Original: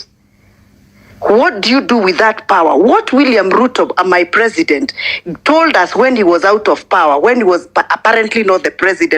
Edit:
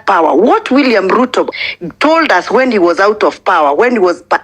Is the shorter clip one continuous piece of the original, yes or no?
no